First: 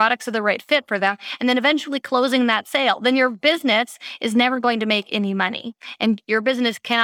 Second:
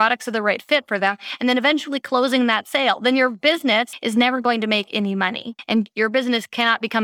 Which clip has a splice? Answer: second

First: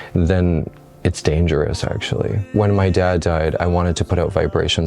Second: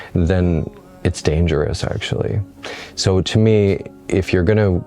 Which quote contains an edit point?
first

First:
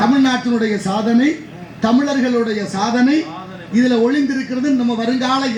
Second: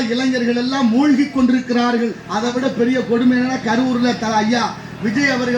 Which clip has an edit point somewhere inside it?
second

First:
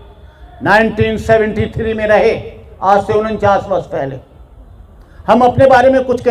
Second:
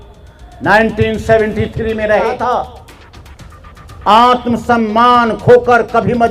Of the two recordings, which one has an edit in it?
second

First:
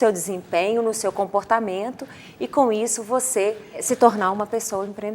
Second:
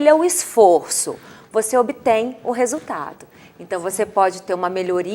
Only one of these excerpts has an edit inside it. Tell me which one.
first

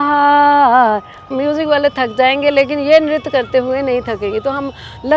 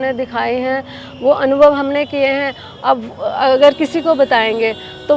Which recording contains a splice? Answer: first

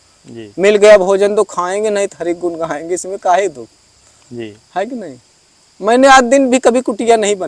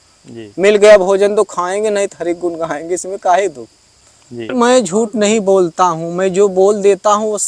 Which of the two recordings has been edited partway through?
second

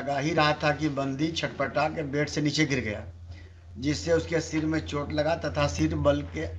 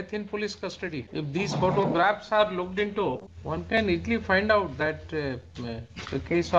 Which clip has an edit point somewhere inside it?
second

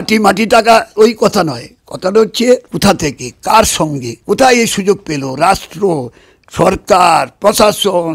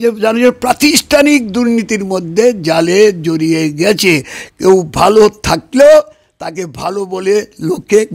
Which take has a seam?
first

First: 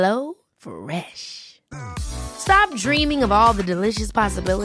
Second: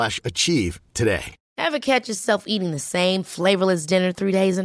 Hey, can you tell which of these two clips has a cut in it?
second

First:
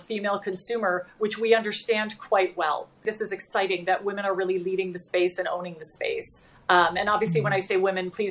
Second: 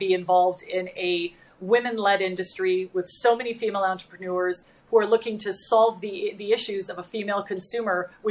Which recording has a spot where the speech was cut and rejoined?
first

